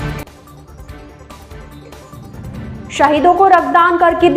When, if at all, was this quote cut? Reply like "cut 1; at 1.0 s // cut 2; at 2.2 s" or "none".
cut 1; at 1.8 s